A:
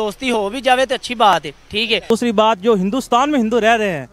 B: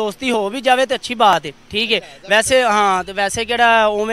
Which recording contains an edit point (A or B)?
A